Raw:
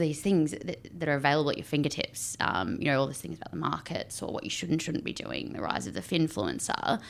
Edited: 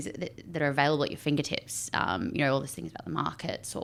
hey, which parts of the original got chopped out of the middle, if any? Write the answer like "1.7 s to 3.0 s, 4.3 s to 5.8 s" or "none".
none